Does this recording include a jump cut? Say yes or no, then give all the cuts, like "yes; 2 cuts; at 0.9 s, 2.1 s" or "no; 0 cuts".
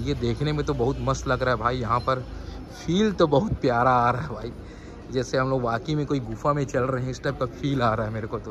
no; 0 cuts